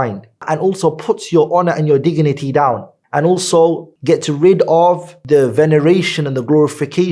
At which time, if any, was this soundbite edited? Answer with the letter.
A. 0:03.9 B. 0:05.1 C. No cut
C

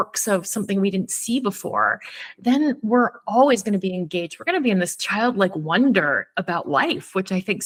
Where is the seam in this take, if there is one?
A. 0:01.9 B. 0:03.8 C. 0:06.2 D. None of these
D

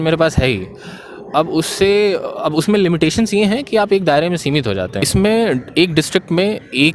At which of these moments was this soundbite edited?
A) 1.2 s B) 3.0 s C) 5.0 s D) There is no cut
C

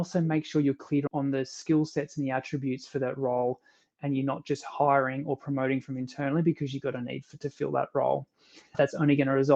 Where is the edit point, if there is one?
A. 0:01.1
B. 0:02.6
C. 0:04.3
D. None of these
A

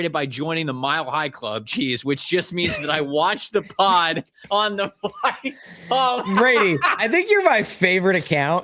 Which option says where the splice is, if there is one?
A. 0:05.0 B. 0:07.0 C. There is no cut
B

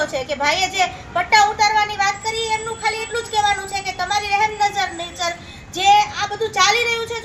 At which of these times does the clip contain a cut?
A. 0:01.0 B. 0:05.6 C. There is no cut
C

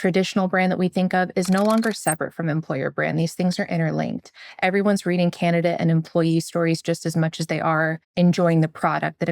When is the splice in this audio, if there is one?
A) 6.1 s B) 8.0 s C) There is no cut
B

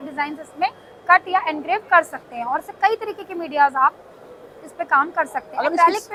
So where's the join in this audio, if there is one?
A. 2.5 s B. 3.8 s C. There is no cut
C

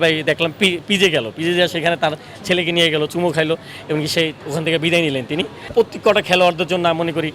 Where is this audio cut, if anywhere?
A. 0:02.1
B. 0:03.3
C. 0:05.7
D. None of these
C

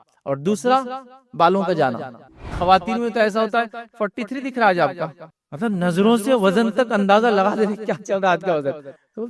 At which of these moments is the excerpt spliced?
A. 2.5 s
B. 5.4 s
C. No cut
A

